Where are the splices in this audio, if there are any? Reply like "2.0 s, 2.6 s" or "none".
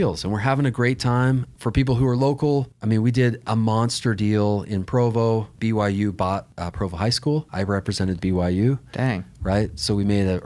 1.5 s, 2.7 s, 5.5 s, 6.6 s, 7.5 s